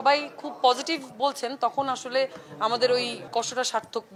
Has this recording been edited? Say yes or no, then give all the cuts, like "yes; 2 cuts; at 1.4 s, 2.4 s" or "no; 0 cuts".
no; 0 cuts